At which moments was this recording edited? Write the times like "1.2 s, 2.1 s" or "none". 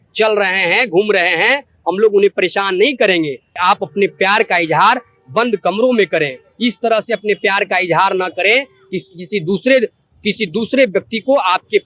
3.5 s